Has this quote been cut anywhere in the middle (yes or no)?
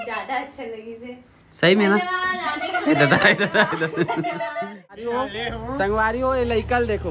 yes